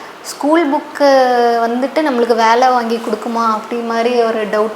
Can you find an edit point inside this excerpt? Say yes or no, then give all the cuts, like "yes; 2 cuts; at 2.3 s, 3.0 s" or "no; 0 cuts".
no; 0 cuts